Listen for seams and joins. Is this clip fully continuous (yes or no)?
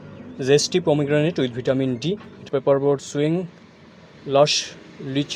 no